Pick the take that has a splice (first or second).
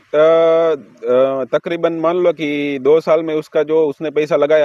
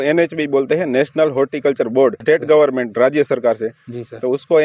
second